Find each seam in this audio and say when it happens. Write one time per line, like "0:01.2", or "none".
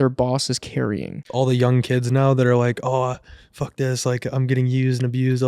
0:01.3